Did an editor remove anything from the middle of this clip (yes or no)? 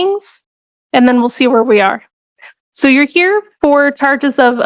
no